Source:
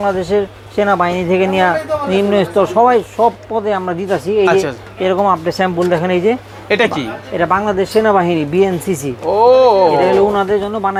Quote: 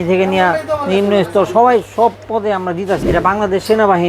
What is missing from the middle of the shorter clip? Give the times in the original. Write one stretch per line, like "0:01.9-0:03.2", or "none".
0:04.2-0:07.3